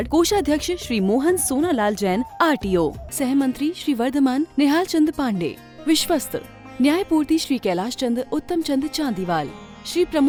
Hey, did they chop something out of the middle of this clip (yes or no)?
no